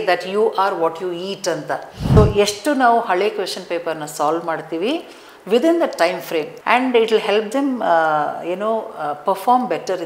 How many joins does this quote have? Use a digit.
2